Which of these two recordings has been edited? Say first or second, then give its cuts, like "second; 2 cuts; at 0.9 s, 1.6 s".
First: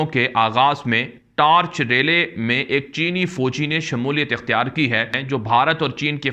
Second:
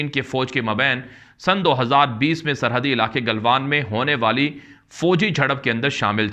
first; 1 cut; at 5.2 s